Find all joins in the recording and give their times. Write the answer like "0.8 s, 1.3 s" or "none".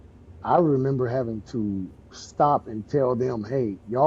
none